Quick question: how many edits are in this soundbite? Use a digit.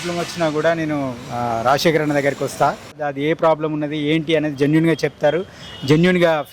1